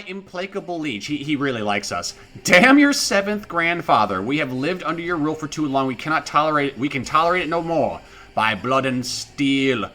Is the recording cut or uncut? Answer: uncut